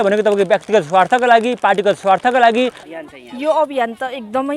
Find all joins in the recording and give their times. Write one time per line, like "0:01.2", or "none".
0:02.8

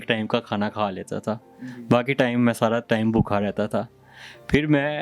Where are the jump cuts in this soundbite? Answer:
none

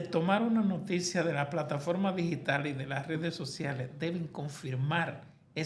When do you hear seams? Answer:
none

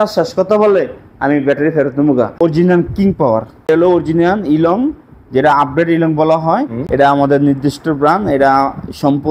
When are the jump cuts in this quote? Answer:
0:02.3
0:03.7
0:06.8

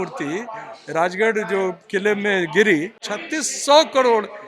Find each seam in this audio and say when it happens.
0:03.1

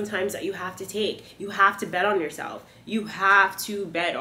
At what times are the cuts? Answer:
none

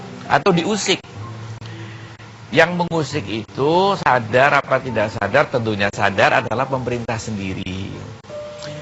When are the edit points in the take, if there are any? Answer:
0:01.4

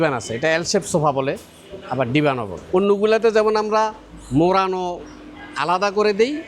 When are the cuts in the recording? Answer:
0:02.5

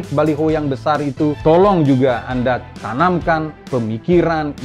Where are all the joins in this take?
0:01.4
0:02.8
0:03.6

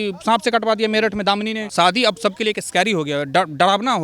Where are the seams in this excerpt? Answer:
0:01.6

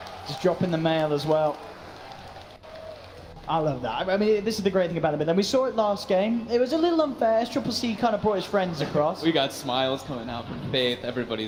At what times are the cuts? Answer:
none

